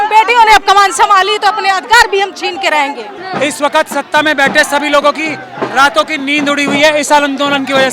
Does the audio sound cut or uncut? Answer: cut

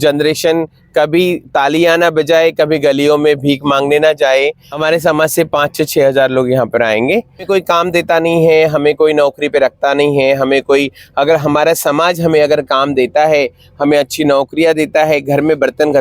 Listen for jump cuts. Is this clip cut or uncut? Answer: cut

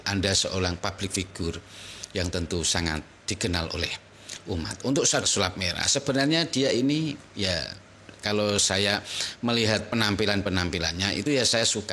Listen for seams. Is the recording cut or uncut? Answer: cut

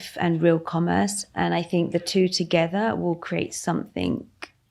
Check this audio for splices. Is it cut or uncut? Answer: uncut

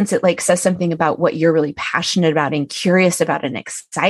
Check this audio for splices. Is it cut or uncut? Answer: uncut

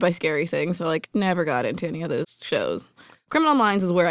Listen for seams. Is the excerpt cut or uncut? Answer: cut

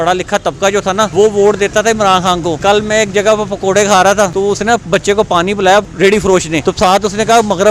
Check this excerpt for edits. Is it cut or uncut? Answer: cut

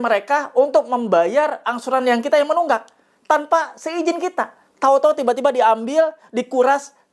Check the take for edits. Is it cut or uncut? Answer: uncut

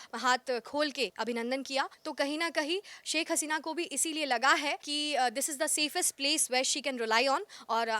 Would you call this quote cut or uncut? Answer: cut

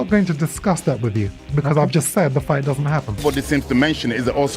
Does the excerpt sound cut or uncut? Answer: cut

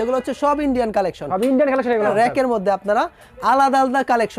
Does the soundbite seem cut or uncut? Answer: cut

